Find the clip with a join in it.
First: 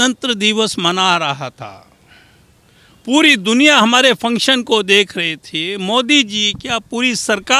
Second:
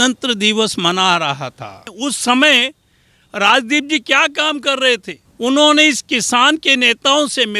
second; 2 cuts; at 1.9 s, 5.2 s

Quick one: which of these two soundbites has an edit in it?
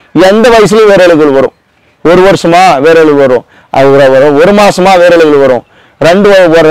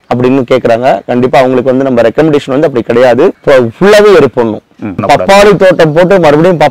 second; 2 cuts; at 3.4 s, 5.1 s

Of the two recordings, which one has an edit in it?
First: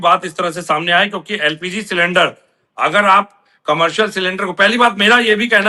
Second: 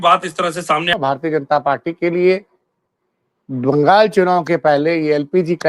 second; 1 cut; at 0.9 s

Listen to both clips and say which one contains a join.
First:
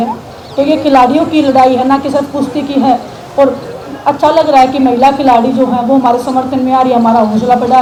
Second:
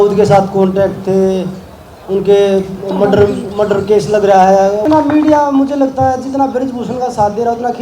second; 1 cut; at 4.8 s

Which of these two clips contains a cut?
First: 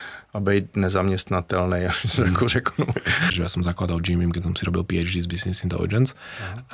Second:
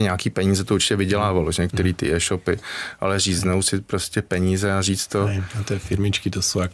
first; 1 cut; at 3.3 s

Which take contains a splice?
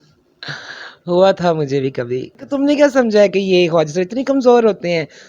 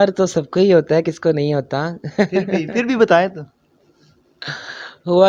first; 1 cut; at 2.5 s

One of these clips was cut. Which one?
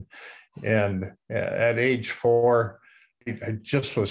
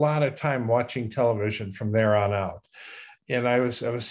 first; 1 cut; at 3.2 s

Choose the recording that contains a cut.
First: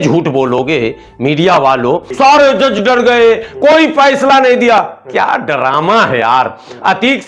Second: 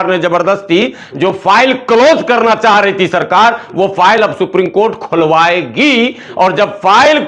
first; 1 cut; at 2.1 s

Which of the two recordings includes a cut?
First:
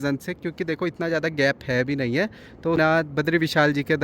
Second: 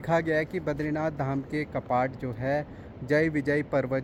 first; 1 cut; at 2.8 s

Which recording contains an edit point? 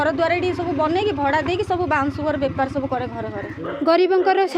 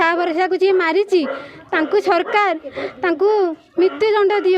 first; 1 cut; at 3.7 s

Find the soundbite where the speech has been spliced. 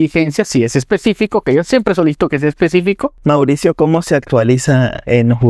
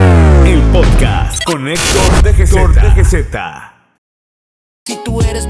first; 1 cut; at 3.2 s

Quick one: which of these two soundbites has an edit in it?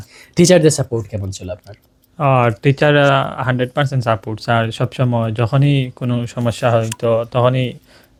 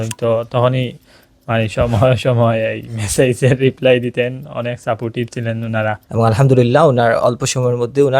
second; 1 cut; at 6.0 s

